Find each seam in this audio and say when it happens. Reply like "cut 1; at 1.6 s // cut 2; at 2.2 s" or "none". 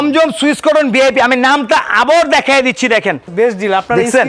cut 1; at 3.3 s